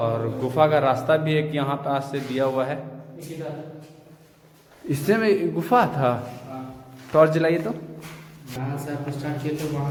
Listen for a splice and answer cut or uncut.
uncut